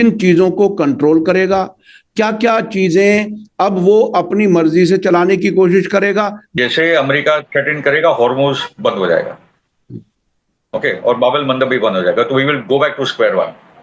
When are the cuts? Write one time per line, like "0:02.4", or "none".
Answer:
0:06.4